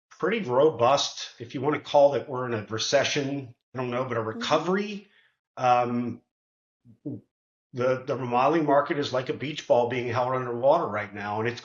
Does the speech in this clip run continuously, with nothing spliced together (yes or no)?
no